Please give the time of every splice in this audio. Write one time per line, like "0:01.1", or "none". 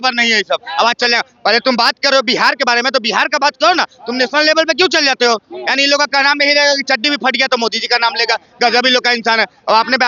none

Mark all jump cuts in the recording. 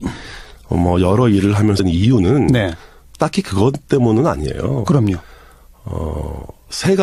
none

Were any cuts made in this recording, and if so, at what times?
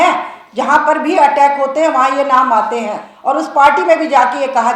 0:03.1

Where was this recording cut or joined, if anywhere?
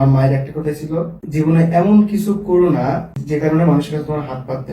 0:01.2
0:03.2

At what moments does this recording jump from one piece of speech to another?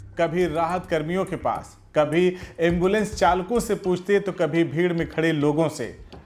none

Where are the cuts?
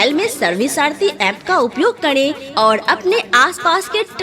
0:02.4

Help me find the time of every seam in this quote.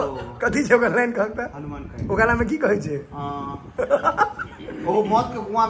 none

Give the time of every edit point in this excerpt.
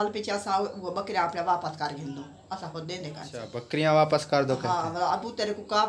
0:03.6

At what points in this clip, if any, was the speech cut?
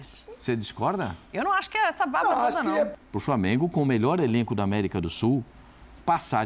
0:02.9

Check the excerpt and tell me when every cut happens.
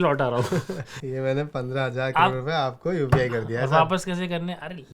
0:00.9

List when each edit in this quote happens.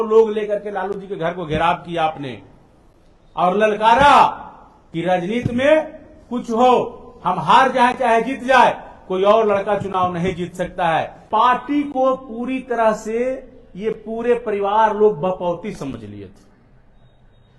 0:11.2

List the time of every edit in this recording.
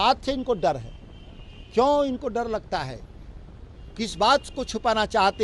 none

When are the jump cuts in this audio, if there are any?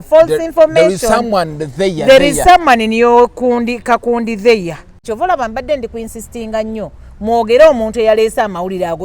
0:05.0

